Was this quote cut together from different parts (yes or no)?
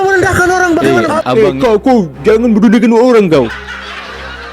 yes